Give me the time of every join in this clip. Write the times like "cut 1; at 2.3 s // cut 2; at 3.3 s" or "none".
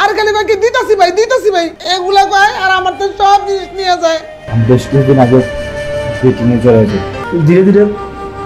cut 1; at 1.8 s // cut 2; at 4.4 s // cut 3; at 7.2 s